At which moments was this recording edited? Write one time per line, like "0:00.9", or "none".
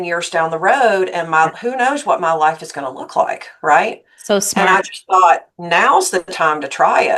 none